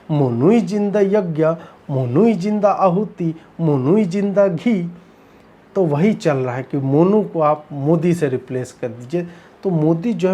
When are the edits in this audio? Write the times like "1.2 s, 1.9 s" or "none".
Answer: none